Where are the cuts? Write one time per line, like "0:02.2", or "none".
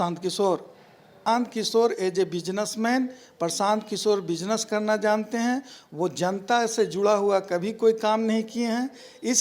0:01.3